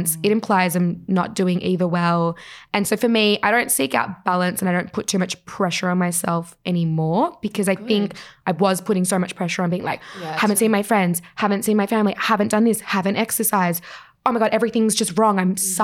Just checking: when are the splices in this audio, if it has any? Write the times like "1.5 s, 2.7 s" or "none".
none